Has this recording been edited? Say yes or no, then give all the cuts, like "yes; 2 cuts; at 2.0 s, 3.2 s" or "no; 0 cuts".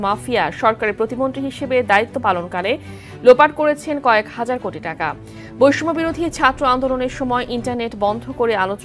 no; 0 cuts